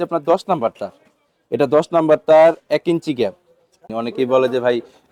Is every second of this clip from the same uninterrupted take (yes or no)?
no